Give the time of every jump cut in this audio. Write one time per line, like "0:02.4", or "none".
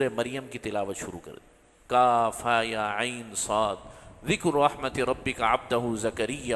none